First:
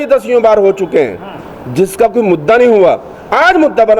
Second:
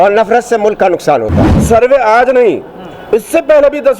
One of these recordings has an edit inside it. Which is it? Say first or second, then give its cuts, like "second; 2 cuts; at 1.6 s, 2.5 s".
second; 1 cut; at 1.5 s